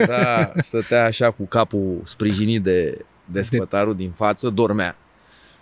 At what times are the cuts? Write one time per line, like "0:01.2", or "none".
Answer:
none

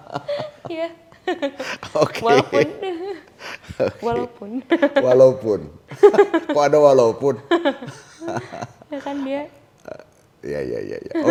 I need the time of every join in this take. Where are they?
none

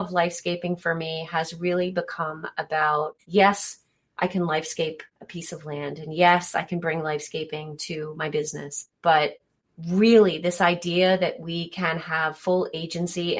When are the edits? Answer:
0:03.2

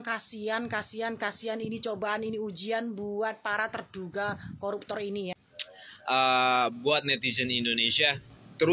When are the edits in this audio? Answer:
0:05.3

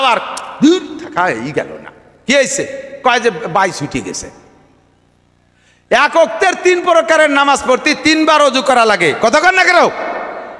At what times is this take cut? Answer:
none

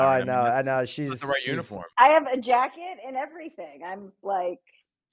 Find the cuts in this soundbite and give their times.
0:01.9

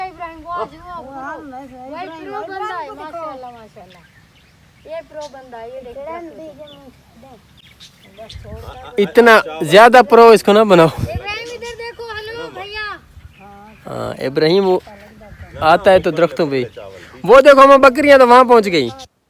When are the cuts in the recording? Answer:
none

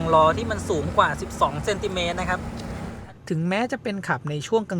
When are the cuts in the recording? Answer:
0:03.0

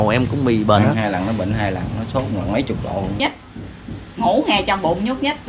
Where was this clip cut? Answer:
0:03.2

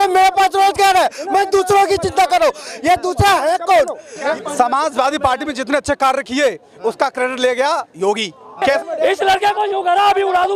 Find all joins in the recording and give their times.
0:04.3
0:08.8

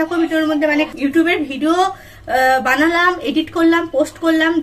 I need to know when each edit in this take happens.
0:00.9

